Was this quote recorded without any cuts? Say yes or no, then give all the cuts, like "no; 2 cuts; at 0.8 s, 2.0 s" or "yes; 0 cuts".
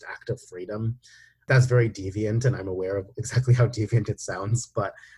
no; 1 cut; at 1.5 s